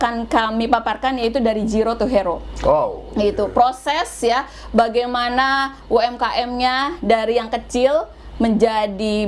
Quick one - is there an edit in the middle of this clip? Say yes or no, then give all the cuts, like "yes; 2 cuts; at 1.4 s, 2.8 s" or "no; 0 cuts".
no; 0 cuts